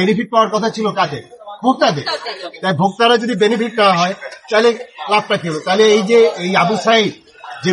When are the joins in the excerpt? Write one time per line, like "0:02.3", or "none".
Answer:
none